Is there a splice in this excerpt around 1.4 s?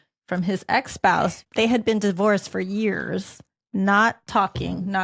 yes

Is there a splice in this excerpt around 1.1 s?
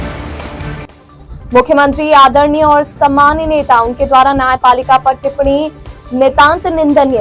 yes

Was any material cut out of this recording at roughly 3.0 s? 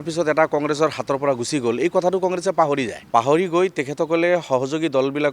yes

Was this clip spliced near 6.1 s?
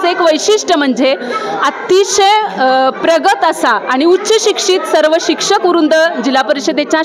no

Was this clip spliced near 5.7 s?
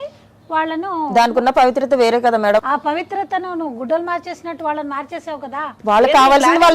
yes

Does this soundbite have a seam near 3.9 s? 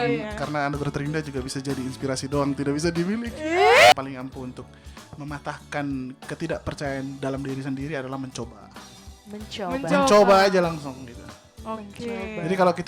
yes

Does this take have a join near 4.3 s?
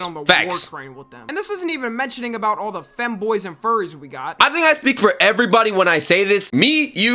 yes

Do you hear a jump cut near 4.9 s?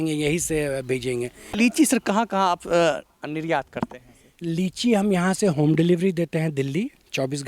no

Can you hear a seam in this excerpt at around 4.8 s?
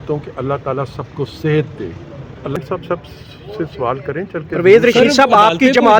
no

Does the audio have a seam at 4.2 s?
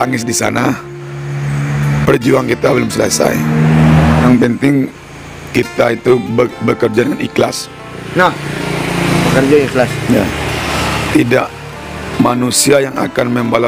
yes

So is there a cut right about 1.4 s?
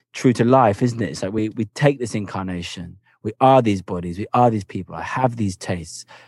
yes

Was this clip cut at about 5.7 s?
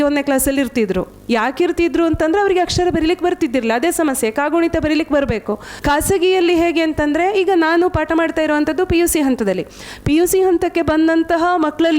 yes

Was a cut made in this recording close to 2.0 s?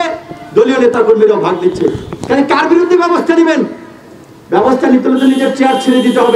no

